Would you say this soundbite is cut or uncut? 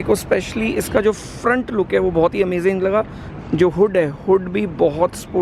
uncut